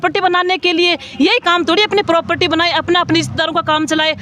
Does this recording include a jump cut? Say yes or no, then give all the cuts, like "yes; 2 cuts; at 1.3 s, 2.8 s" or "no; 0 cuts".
no; 0 cuts